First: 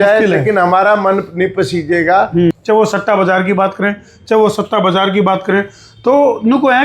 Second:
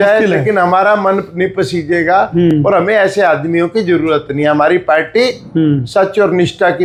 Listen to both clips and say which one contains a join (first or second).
first